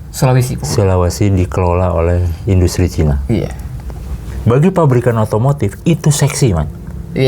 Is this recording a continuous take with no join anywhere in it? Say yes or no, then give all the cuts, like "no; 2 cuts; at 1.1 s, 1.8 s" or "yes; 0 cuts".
no; 1 cut; at 4.3 s